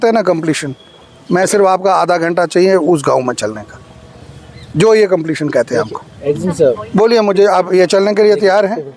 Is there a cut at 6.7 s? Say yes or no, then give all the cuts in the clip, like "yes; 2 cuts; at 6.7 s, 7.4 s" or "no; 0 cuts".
no; 0 cuts